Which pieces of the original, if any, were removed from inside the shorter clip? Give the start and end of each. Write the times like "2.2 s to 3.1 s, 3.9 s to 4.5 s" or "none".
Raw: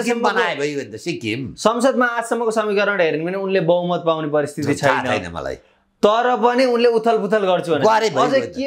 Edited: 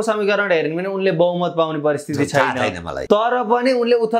5.4 s to 5.8 s